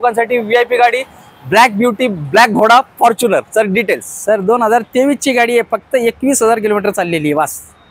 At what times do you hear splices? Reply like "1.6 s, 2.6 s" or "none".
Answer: none